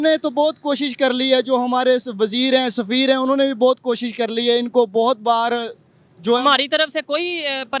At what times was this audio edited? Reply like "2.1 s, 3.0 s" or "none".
none